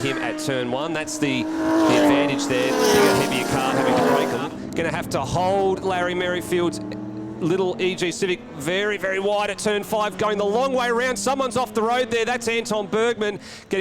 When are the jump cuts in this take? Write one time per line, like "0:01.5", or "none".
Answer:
0:04.4